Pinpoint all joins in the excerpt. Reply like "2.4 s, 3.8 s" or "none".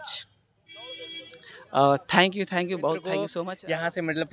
3.3 s